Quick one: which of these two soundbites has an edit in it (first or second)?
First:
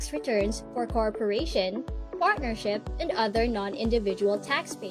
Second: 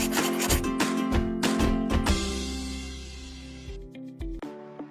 first